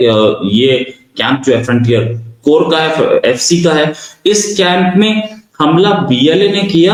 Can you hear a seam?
no; 0 cuts

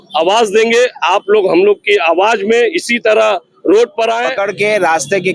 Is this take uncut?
no; 1 cut; at 4.3 s

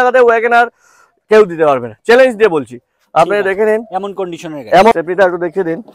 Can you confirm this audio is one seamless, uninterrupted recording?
yes; 0 cuts

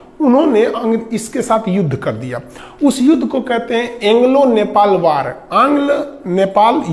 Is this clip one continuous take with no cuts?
yes; 0 cuts

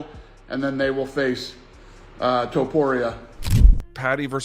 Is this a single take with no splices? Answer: no; 1 cut; at 3.4 s

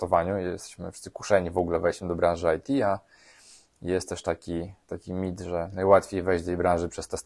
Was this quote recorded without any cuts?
yes; 0 cuts

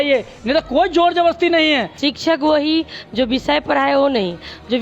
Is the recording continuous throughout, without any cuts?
no; 1 cut; at 1.9 s

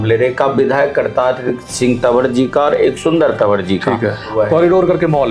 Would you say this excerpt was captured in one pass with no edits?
no; 1 cut; at 4.3 s

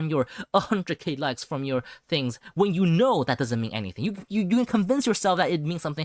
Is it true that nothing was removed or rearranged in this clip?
yes; 0 cuts

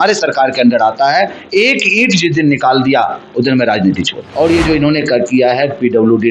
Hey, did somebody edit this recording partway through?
yes; 1 cut; at 4.2 s

